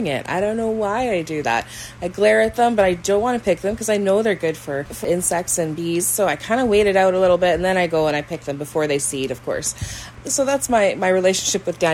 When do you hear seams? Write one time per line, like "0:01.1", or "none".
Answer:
0:05.0
0:10.1